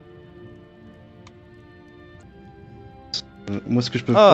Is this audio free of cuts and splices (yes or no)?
no